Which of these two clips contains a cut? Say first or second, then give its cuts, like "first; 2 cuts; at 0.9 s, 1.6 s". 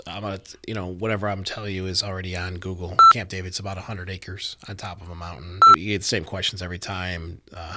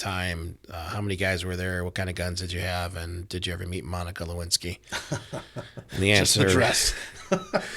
first; 2 cuts; at 3.1 s, 5.6 s